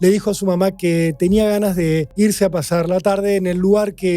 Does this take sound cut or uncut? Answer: cut